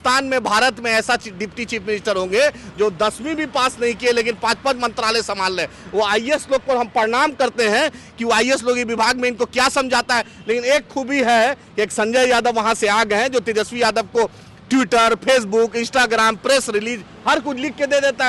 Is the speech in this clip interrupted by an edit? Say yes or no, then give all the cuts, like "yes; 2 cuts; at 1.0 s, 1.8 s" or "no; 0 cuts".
no; 0 cuts